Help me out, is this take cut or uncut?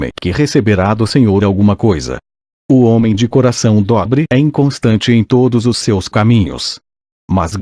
cut